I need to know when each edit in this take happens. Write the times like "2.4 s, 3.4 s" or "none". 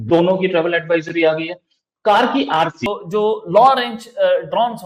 2.8 s